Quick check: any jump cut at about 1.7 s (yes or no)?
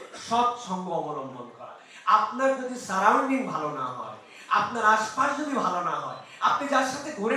no